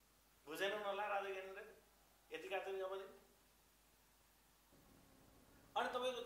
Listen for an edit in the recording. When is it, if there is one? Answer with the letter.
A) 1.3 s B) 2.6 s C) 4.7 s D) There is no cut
C